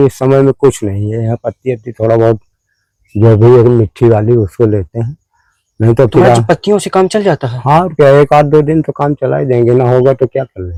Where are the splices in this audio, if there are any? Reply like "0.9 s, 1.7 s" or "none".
none